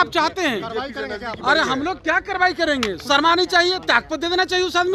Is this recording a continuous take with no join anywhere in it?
yes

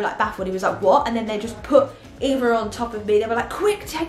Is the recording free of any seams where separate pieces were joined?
yes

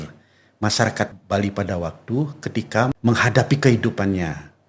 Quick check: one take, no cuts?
no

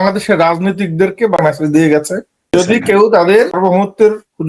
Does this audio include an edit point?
yes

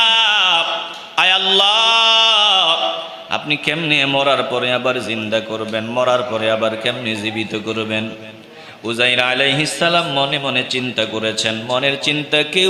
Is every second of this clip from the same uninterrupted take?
yes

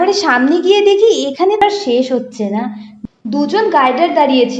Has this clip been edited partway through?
yes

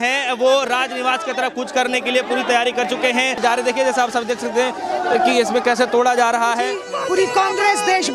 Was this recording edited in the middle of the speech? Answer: yes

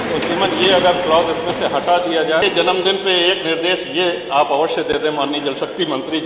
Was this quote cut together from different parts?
yes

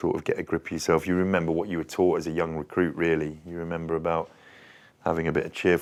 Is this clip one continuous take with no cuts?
yes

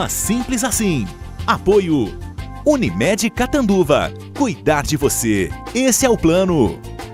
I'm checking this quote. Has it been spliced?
no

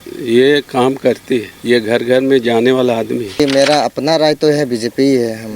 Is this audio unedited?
no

